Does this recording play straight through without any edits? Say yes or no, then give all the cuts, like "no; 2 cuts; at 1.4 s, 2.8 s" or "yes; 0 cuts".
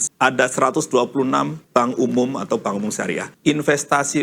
no; 1 cut; at 3.3 s